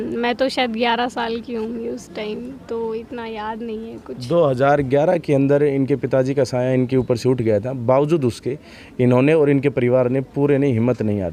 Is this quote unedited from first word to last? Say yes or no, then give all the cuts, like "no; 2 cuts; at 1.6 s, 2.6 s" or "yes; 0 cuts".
yes; 0 cuts